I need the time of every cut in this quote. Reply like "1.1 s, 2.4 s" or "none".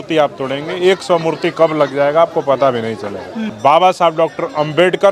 none